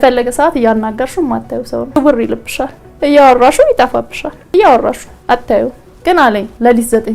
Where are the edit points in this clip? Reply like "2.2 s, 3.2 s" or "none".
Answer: 5.8 s